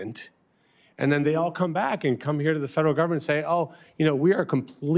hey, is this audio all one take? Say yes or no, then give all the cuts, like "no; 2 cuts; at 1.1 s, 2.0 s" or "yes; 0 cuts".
yes; 0 cuts